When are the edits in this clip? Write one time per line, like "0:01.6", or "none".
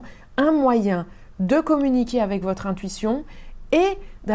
none